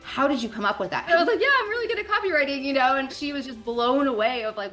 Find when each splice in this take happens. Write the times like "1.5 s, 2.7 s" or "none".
1.0 s, 3.2 s

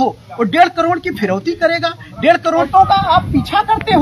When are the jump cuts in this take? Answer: 2.7 s

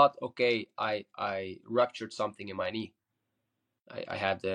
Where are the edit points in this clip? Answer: none

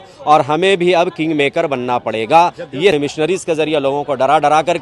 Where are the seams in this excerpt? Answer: 2.9 s

